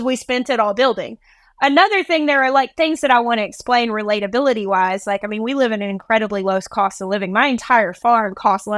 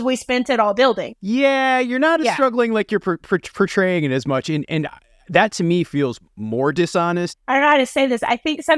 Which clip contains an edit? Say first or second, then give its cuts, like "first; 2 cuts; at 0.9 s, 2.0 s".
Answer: second; 2 cuts; at 1.1 s, 7.4 s